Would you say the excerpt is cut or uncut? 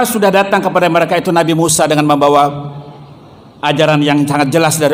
uncut